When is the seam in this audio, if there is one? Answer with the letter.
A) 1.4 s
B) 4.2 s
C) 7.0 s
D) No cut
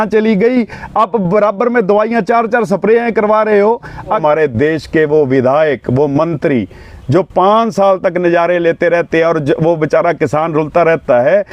B